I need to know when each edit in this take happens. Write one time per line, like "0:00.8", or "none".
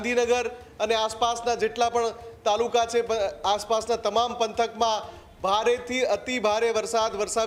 none